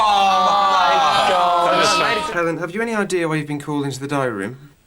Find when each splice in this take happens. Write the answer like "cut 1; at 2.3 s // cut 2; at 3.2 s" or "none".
cut 1; at 2.2 s